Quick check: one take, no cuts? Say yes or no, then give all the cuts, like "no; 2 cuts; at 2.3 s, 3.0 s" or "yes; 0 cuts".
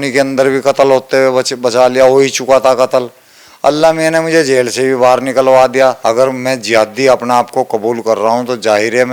no; 1 cut; at 6.0 s